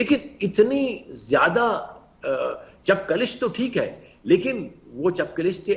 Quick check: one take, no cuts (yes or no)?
yes